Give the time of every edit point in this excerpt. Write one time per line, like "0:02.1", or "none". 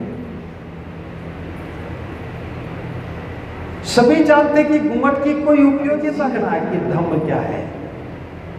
0:06.3